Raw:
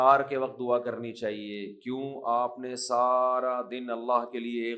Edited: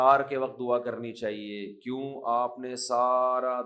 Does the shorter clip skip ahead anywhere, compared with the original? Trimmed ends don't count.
no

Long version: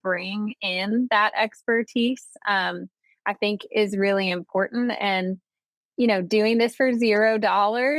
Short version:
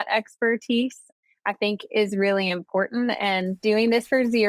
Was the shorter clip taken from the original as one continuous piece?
no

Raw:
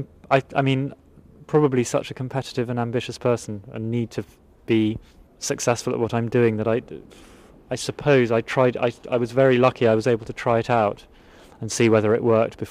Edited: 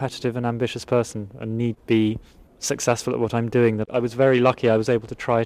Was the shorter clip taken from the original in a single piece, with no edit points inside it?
no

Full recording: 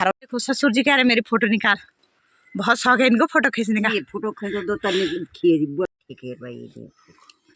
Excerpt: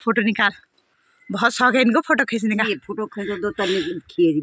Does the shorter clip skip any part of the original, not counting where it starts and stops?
no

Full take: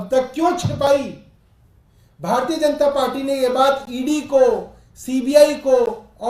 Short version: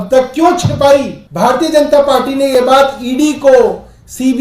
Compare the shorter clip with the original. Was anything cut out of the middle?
yes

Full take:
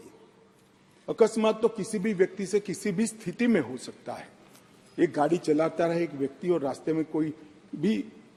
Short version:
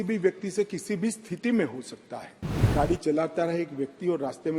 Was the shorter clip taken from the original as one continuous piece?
no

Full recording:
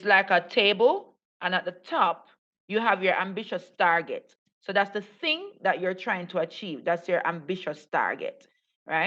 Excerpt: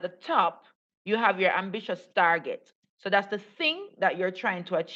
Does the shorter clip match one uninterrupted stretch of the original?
yes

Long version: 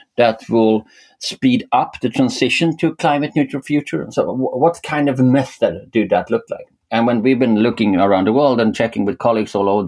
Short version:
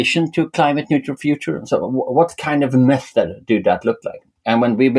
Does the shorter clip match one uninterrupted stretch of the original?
yes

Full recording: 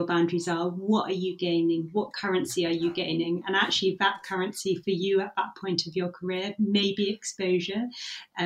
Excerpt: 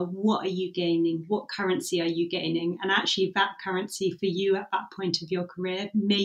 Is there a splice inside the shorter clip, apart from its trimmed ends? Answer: no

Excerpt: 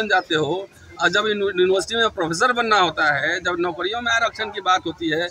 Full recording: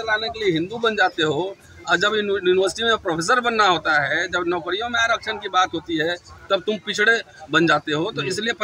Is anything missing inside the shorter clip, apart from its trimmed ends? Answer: no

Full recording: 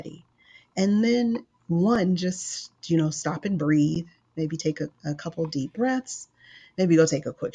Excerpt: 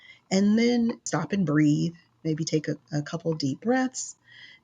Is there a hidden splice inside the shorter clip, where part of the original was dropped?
yes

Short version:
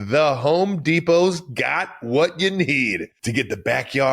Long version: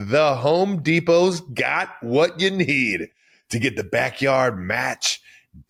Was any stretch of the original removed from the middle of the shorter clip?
yes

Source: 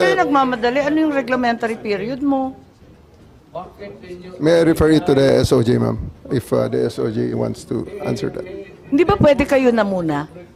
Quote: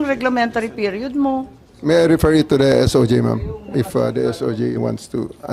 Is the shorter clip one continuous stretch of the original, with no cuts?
no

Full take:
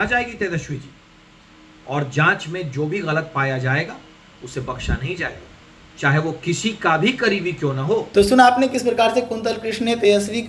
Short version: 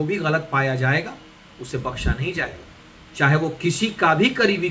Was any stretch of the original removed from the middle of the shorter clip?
no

